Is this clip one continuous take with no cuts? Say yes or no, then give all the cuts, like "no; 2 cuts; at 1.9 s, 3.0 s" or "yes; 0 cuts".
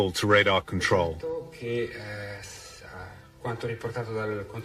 yes; 0 cuts